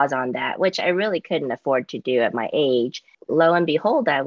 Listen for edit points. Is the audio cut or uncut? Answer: cut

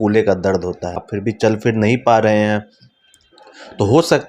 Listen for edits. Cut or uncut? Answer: cut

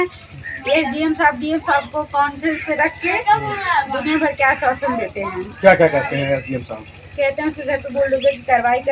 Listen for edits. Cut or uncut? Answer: uncut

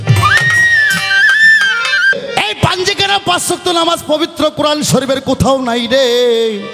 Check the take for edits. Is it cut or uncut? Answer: cut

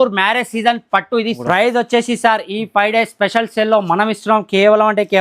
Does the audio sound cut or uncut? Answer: cut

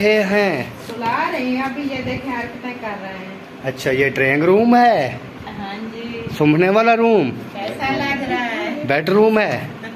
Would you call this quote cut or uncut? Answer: uncut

